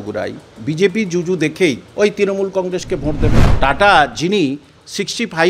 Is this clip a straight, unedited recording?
no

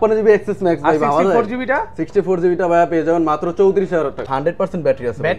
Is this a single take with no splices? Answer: no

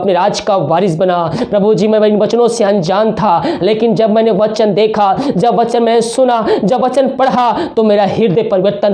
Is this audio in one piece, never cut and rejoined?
yes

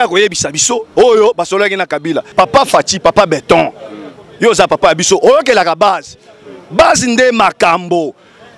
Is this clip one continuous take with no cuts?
no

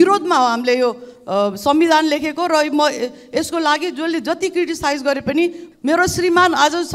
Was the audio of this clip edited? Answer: yes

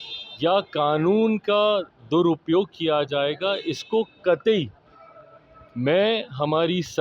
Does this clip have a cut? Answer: no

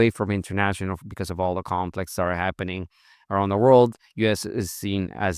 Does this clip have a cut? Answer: no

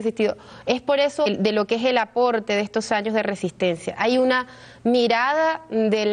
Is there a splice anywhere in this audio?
no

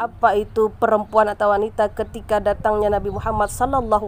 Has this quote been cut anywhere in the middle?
no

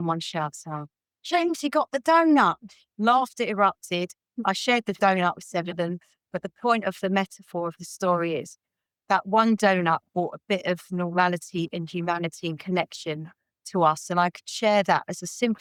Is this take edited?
no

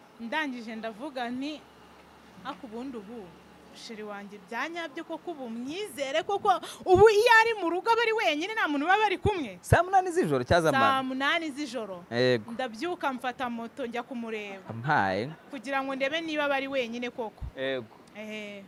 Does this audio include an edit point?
no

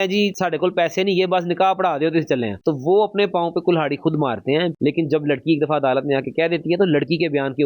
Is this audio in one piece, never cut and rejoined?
no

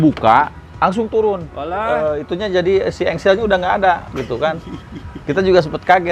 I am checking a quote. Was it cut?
no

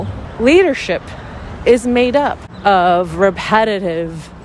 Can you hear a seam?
yes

